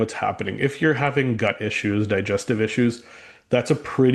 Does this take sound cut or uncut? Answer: uncut